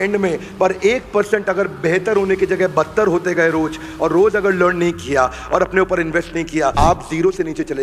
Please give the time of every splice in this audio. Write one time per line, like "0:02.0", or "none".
0:06.7